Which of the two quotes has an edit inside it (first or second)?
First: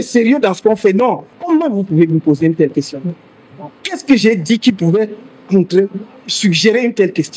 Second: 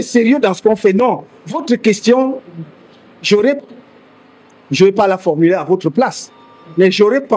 first